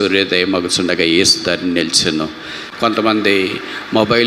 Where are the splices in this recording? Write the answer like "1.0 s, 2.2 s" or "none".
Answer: 2.6 s